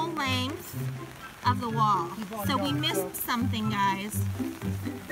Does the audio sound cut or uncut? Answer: uncut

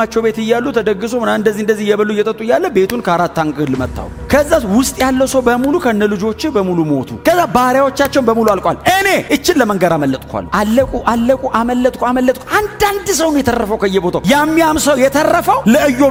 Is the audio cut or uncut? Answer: uncut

